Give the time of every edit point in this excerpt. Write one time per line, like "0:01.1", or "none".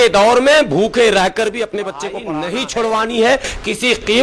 0:02.1

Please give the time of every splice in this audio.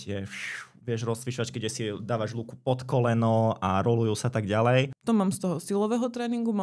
0:04.9

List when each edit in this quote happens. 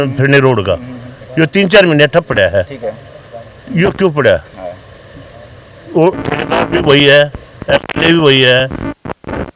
none

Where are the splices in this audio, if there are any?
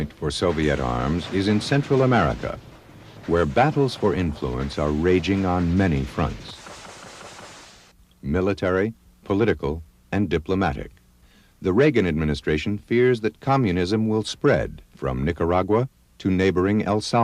0:14.4

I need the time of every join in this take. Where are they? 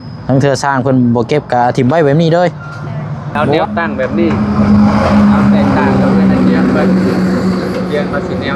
0:03.5

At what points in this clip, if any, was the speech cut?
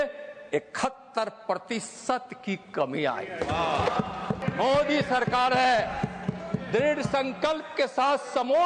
0:04.4

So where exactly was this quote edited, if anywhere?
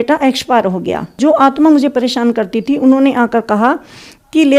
0:01.2

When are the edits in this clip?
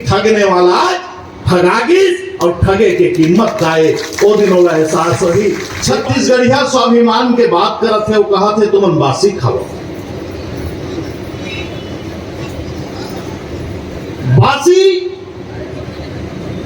0:05.7

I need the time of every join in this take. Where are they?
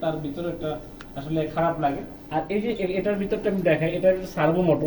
0:02.3

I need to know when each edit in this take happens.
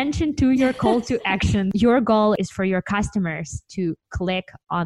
0:01.7

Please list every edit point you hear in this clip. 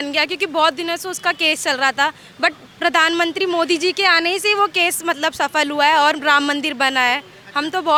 none

